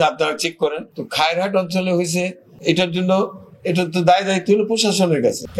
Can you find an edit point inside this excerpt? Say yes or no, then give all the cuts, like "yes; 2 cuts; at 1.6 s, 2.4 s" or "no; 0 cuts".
no; 0 cuts